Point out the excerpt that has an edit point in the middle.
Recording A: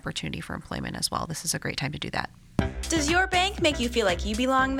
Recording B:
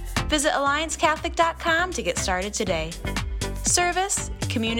A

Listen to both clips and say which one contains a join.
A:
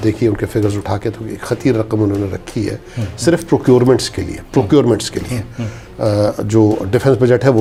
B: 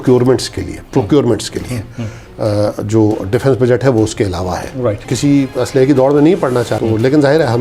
B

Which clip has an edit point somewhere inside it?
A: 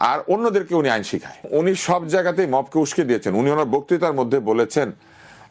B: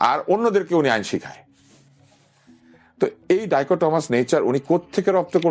A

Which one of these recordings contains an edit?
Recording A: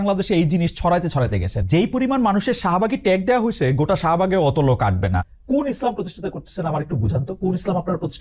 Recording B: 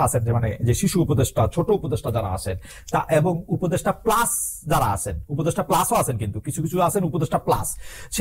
A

